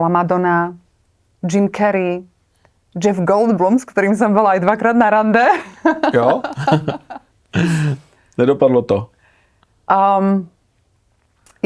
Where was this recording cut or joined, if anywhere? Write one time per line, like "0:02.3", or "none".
none